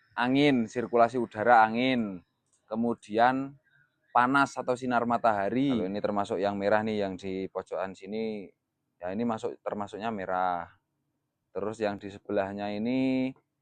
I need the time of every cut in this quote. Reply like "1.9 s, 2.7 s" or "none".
5.8 s